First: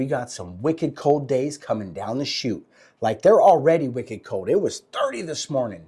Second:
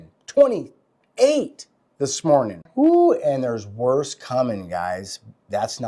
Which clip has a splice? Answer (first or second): second